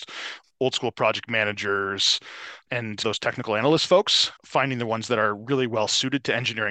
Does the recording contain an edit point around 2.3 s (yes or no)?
no